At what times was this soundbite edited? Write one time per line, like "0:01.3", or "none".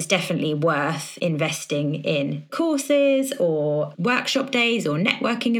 0:01.1
0:02.5
0:03.9